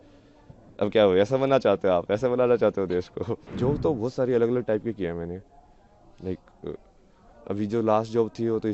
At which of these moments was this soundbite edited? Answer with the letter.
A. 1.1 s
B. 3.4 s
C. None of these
B